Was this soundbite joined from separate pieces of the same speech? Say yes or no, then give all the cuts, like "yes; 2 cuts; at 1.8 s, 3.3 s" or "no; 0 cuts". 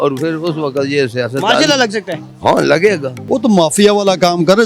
yes; 1 cut; at 3.1 s